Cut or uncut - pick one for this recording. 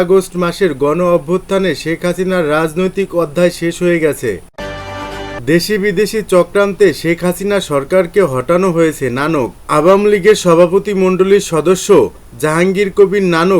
cut